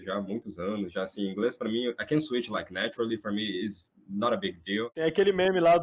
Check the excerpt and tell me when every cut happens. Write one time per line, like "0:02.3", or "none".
0:04.9